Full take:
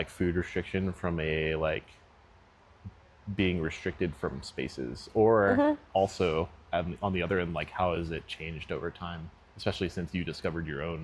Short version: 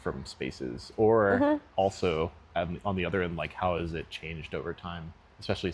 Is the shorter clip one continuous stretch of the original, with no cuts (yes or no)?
yes